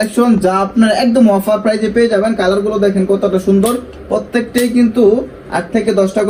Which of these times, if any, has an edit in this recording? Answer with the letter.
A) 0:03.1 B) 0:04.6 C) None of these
C